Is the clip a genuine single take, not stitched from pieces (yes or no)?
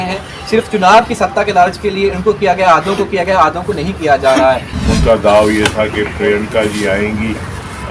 no